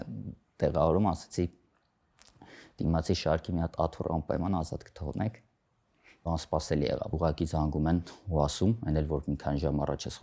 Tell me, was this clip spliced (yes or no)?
yes